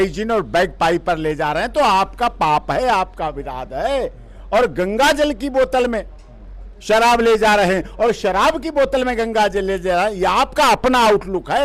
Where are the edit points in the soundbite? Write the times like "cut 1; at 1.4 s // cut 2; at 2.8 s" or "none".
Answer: none